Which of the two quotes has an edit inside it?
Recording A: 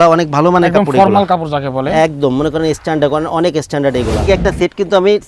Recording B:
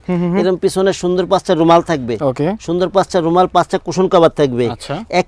A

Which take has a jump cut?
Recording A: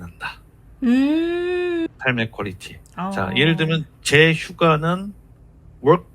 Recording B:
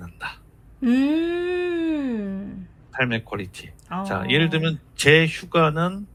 A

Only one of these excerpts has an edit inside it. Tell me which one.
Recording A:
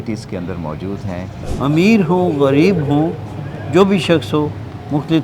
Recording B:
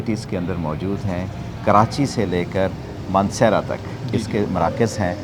A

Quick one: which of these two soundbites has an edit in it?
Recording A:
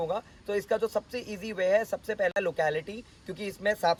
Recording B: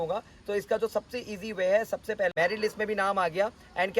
B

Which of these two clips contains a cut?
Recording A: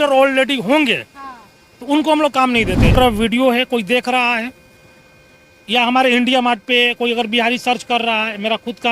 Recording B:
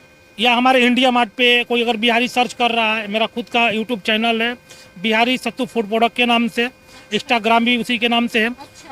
A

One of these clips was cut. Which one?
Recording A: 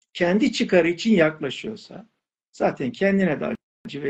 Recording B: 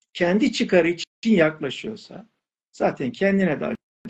A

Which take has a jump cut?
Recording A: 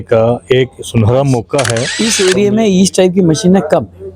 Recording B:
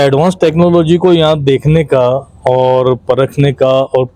A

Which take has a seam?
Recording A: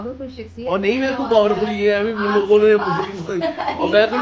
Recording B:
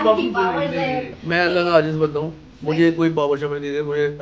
B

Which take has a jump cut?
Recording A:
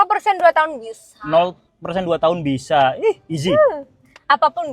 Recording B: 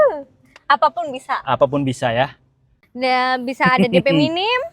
B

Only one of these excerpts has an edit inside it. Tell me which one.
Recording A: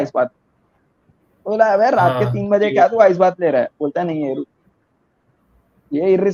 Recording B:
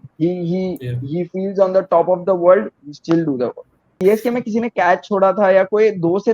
B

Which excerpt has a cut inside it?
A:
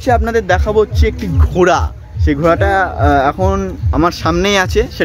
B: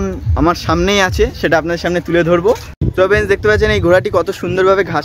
B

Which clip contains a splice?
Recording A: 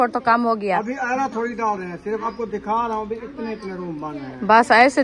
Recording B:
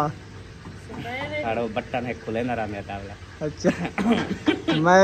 A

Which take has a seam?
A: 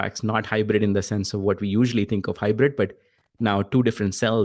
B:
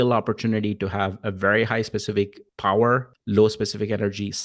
B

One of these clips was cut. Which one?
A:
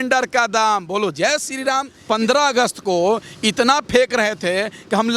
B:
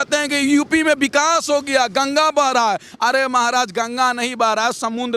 A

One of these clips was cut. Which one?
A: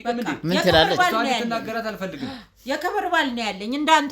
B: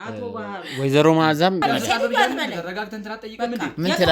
B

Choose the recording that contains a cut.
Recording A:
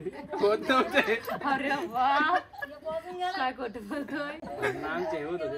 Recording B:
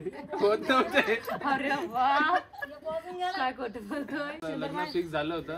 B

